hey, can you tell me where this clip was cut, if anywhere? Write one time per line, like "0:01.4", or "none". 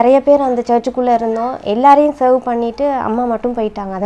none